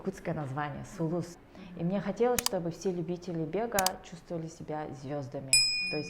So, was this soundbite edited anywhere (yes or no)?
yes